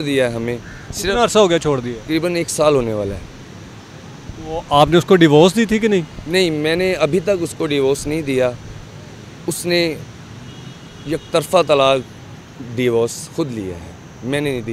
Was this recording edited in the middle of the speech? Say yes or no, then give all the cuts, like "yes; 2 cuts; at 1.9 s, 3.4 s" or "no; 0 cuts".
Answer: no; 0 cuts